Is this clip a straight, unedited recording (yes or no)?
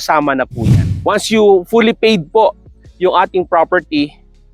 no